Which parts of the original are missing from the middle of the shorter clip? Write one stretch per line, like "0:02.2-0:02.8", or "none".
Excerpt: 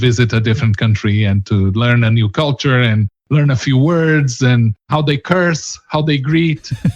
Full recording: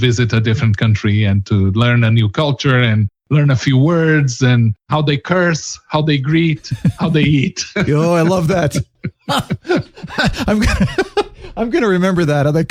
none